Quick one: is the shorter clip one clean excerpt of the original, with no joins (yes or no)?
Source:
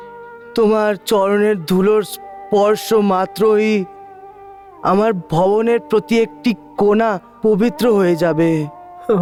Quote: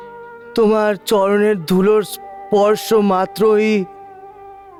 yes